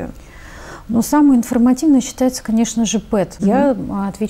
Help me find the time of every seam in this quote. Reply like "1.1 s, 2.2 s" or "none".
3.3 s